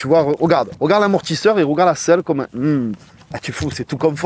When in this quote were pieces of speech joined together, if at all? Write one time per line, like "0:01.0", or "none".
none